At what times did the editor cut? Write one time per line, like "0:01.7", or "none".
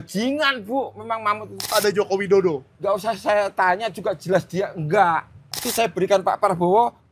0:01.7
0:02.7
0:05.7